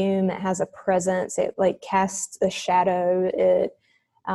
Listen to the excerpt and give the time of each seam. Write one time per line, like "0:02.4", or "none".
none